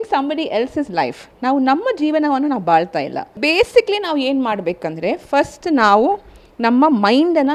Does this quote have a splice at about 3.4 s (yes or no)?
yes